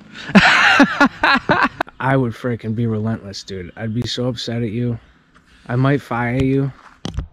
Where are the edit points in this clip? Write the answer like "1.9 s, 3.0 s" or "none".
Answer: 1.9 s